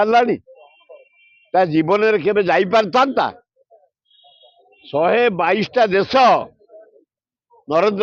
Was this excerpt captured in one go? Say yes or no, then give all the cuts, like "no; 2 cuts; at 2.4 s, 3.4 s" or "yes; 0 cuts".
yes; 0 cuts